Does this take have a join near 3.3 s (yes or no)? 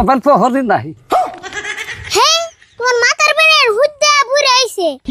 no